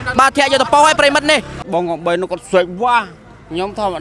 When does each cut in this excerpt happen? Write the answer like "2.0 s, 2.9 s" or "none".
1.6 s

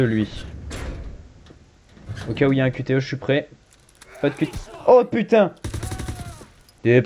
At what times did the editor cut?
none

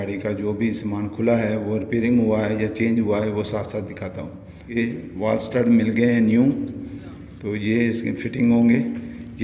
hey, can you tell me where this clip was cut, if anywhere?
4.8 s

